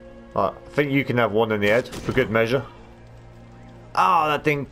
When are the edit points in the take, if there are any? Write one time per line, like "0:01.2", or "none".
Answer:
none